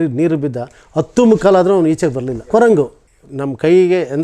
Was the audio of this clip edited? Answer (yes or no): yes